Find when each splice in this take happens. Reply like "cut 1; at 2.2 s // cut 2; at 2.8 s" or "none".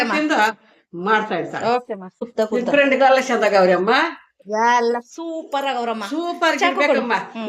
cut 1; at 2.2 s